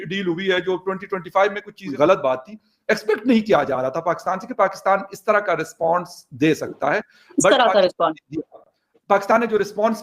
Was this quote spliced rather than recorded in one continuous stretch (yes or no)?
yes